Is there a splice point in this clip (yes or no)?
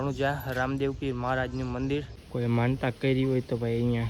yes